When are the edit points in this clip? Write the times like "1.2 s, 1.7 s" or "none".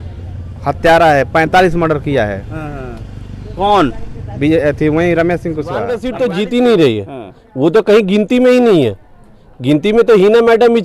6.0 s